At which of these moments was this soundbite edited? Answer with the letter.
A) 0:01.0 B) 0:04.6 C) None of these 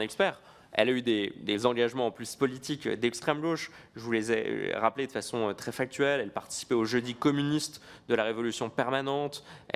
C